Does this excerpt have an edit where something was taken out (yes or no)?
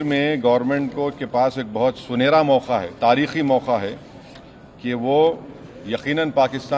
no